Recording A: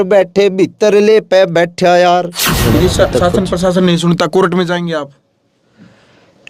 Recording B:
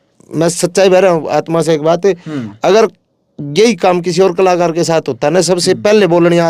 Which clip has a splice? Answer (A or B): A